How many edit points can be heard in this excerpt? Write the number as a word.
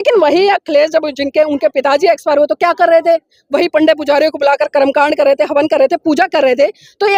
zero